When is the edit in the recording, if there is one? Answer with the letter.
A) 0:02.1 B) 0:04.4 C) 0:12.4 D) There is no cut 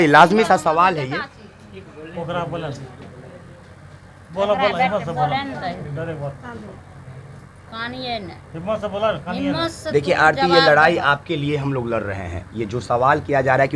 D